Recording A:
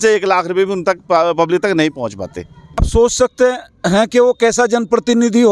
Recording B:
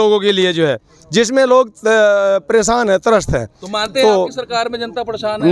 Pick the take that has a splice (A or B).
A